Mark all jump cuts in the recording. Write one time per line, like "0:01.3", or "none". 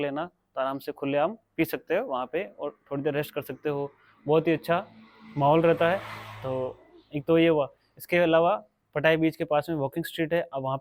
none